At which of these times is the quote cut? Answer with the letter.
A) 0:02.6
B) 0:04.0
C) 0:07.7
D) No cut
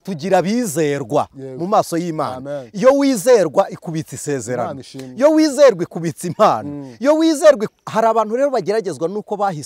C